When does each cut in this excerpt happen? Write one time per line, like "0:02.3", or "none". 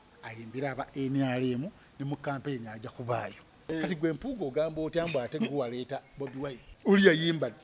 0:03.6
0:06.7

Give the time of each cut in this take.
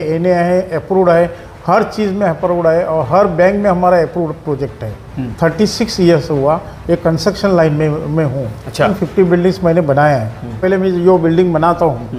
0:05.2
0:08.9
0:10.6

